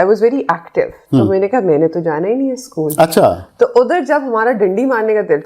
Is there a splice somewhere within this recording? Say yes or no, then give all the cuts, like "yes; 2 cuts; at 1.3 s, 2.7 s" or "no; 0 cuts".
yes; 1 cut; at 3.4 s